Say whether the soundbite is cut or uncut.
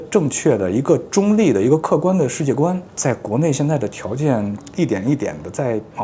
uncut